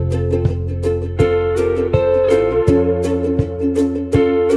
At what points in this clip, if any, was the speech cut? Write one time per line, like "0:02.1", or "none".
none